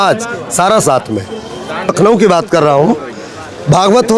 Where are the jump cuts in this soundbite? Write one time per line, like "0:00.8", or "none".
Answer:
0:01.9